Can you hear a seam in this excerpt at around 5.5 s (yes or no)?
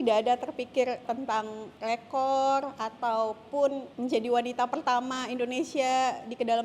no